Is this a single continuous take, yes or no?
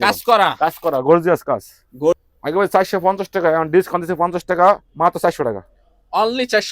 no